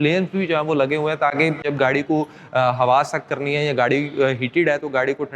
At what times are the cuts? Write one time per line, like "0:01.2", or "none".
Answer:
0:01.6